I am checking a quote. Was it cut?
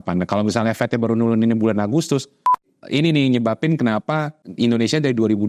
yes; 2 cuts; at 2.6 s, 4.4 s

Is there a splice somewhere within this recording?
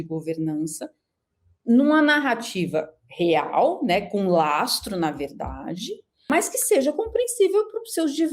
yes; 1 cut; at 6.3 s

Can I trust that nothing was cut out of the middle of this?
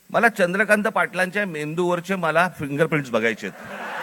yes; 0 cuts

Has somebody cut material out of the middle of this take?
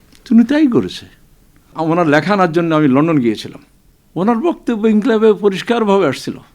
yes; 1 cut; at 1.7 s

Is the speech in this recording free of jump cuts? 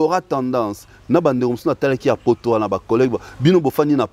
yes; 0 cuts

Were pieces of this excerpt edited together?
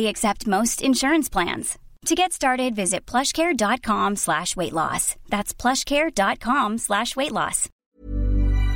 yes; 1 cut; at 7.7 s

